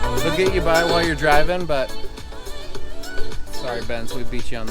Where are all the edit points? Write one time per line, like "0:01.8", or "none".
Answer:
0:03.5